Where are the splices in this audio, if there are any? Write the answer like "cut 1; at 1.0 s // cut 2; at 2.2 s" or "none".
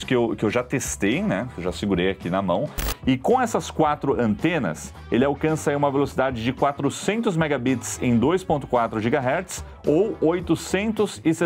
cut 1; at 2.8 s